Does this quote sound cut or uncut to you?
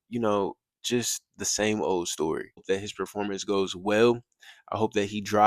cut